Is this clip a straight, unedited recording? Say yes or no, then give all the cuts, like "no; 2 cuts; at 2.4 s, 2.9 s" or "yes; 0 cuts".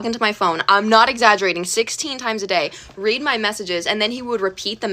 yes; 0 cuts